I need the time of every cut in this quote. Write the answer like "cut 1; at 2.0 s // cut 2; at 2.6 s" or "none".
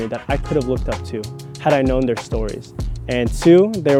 none